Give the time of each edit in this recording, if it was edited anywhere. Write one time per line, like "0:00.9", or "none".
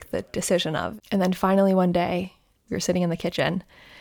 0:00.9
0:02.6